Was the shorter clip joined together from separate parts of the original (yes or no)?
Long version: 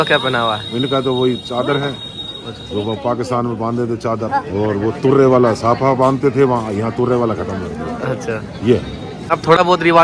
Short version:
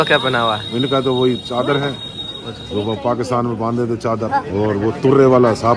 no